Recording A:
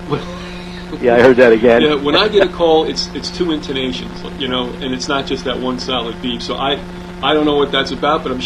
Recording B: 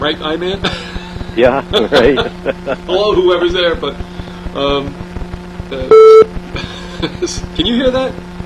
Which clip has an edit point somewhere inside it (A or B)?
B